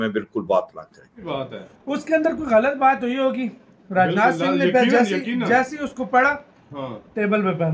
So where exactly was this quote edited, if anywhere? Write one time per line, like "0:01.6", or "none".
0:01.2